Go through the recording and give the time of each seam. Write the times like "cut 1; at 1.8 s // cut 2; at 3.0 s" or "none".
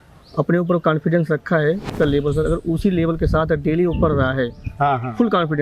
cut 1; at 1.9 s